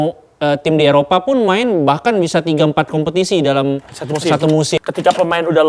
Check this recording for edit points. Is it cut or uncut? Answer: cut